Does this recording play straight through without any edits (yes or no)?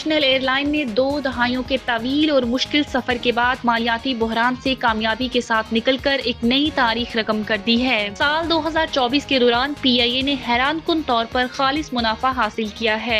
yes